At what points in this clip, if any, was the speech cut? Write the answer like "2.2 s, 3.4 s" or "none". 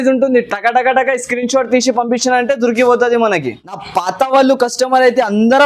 3.8 s